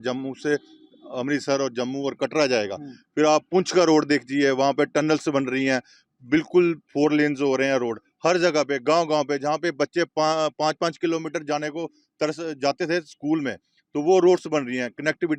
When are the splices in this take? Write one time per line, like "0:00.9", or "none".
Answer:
none